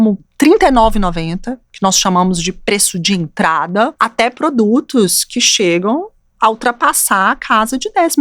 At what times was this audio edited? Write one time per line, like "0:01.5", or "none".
0:03.9

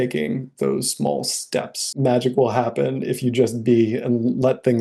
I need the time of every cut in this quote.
0:01.8

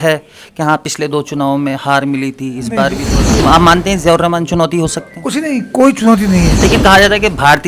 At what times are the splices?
0:03.4
0:06.5

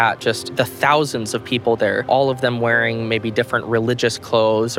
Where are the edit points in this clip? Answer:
0:02.0

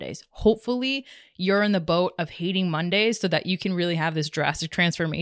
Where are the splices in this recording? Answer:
none

